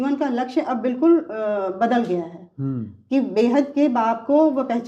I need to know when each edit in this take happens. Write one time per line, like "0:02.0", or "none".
none